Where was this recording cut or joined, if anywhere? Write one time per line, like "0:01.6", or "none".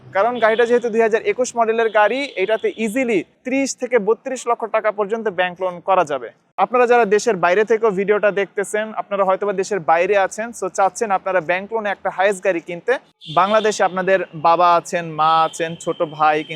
0:03.4
0:06.6
0:13.1

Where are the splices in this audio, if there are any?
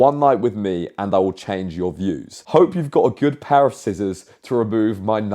0:02.3

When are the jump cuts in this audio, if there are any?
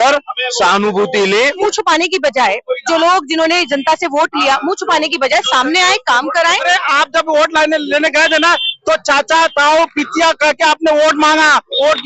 0:01.6
0:06.6

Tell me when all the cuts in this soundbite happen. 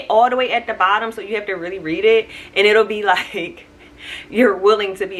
none

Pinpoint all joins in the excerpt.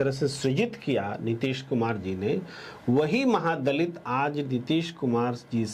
none

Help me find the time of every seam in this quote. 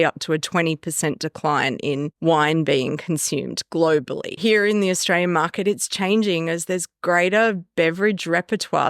0:04.4

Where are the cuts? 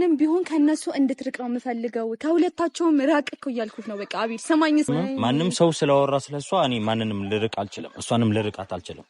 0:04.9

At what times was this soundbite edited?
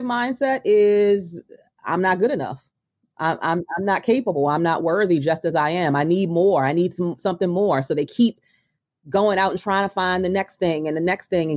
none

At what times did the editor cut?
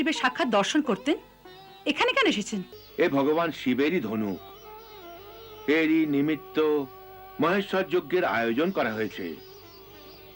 0:02.8

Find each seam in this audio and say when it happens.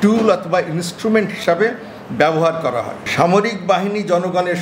0:03.0

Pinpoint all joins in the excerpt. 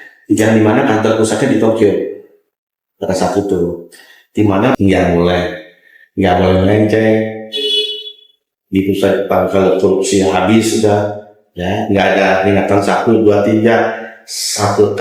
0:04.8

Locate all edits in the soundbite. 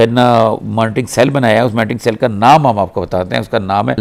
none

